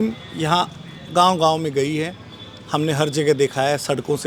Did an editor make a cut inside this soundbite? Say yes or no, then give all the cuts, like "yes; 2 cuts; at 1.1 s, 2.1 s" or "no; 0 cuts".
no; 0 cuts